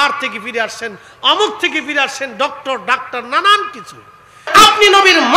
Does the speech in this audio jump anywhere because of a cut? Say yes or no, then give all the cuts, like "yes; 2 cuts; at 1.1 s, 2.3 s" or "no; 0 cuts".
yes; 1 cut; at 4.4 s